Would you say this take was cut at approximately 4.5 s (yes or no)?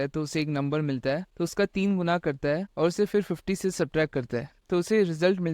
yes